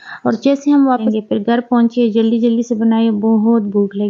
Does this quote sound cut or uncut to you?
cut